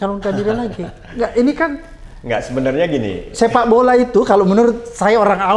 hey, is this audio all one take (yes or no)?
yes